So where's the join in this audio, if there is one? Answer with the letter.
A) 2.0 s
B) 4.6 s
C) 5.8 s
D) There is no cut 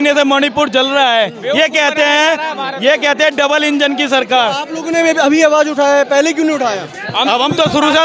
D